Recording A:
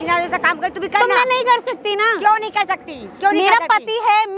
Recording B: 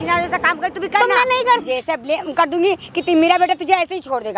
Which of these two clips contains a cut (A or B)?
B